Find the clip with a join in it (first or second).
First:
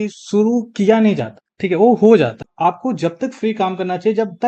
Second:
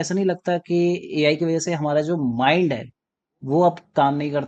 first